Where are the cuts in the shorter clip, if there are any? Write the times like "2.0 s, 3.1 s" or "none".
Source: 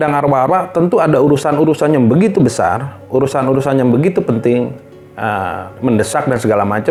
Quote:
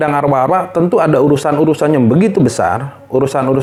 none